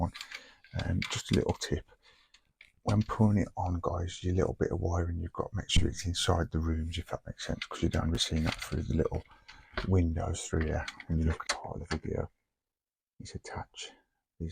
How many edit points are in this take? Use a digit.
1